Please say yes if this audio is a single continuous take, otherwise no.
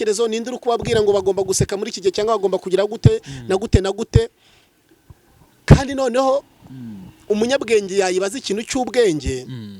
yes